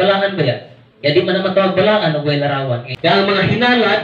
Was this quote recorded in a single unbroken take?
no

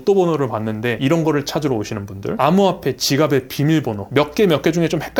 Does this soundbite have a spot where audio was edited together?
no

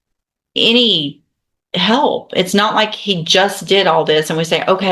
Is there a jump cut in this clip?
no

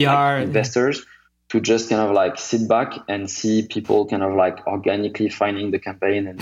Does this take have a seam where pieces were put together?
no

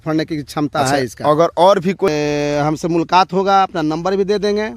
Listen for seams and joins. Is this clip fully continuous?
no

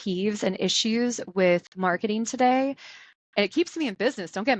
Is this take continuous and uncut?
yes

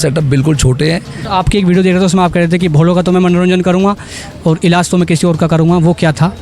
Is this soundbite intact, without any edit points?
no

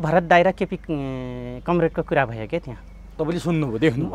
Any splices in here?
no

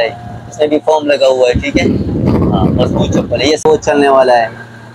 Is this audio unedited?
no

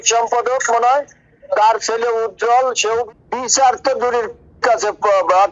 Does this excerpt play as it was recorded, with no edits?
no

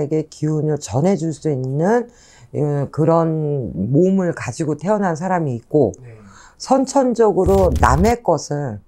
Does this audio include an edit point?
no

